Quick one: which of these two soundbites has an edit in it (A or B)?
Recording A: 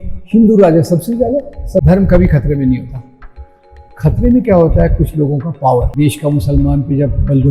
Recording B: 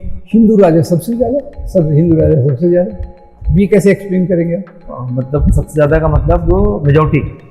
A